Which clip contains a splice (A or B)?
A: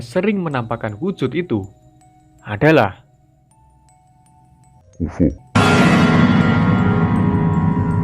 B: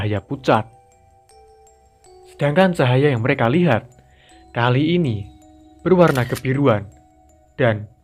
A